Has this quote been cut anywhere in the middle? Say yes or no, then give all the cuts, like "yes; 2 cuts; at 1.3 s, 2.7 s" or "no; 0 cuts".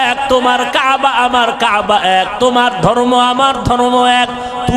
no; 0 cuts